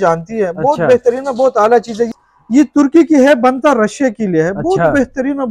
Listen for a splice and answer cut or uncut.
cut